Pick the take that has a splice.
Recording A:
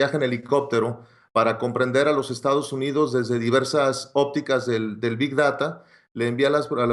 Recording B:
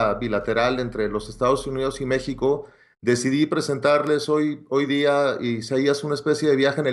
B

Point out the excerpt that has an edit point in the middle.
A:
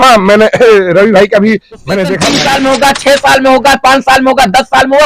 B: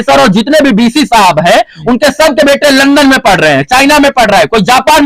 A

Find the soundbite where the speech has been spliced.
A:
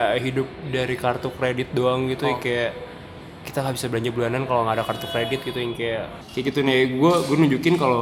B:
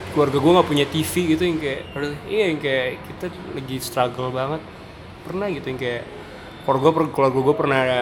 A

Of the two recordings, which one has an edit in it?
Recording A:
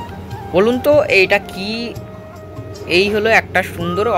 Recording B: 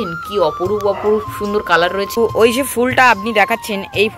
B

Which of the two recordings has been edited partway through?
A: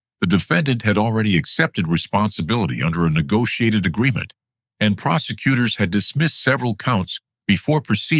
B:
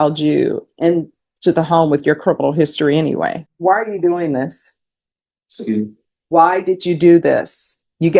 B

